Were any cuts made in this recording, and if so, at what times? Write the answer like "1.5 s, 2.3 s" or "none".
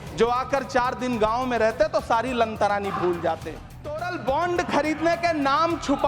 3.8 s